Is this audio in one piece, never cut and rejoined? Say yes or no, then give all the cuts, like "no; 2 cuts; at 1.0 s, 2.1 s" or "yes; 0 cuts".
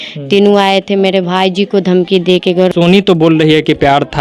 no; 1 cut; at 2.7 s